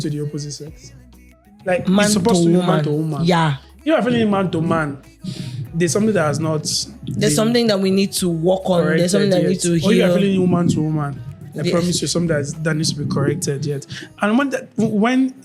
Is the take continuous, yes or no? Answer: yes